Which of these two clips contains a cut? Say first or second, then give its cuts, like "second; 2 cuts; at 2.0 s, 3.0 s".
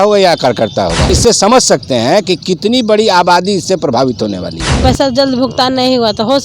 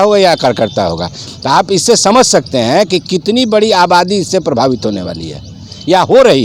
first; 2 cuts; at 1.1 s, 4.8 s